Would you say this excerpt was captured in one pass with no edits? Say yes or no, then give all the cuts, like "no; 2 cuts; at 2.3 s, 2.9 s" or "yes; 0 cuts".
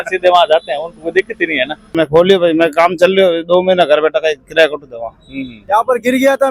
no; 2 cuts; at 1.9 s, 5.5 s